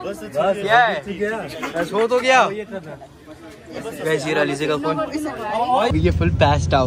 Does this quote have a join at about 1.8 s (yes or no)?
no